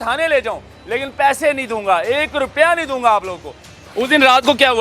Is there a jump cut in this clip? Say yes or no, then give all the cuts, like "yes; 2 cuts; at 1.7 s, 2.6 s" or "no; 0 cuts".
yes; 1 cut; at 3.7 s